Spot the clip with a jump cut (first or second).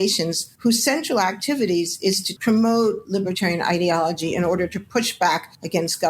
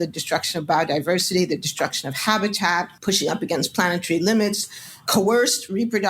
first